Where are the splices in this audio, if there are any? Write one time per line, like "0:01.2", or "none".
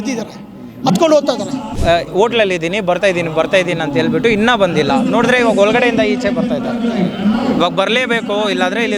0:01.7